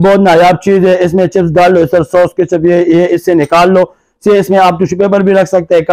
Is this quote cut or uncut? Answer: uncut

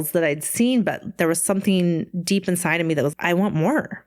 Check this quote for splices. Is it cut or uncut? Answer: cut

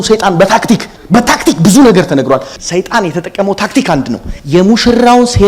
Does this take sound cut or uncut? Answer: cut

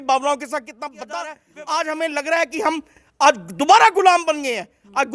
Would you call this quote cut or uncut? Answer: cut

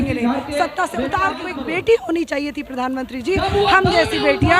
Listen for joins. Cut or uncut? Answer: cut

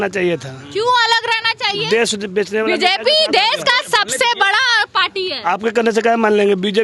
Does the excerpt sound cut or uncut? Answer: uncut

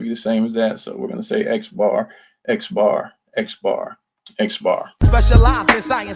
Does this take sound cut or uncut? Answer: cut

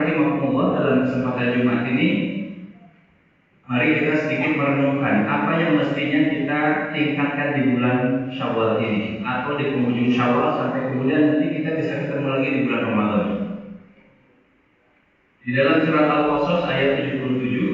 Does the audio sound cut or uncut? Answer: uncut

